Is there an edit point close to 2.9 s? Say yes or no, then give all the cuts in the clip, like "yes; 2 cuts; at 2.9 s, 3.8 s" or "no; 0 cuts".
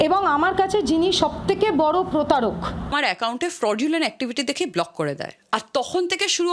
yes; 1 cut; at 2.9 s